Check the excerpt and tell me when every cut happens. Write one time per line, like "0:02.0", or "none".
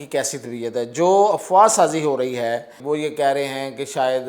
0:02.7